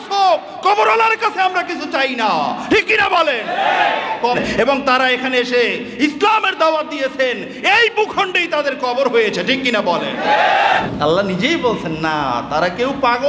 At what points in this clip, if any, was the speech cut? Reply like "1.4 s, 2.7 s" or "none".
4.4 s, 10.8 s